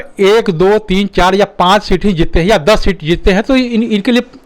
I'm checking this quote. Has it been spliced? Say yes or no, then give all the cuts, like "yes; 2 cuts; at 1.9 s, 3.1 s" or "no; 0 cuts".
no; 0 cuts